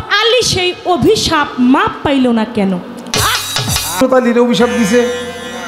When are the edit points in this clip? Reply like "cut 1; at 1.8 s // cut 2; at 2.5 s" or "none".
cut 1; at 4.0 s